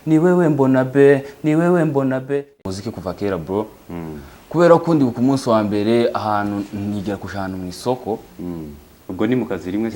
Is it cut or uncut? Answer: cut